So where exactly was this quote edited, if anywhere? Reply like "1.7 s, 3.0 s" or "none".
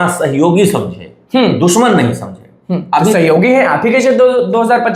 none